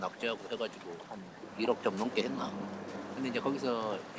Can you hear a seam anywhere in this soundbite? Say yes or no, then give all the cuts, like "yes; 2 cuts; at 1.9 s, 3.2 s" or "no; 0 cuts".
no; 0 cuts